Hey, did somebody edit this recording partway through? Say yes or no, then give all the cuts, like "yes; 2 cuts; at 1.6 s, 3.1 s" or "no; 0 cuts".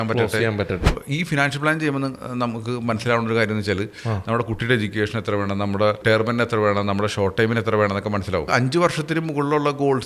yes; 3 cuts; at 0.9 s, 6.0 s, 8.5 s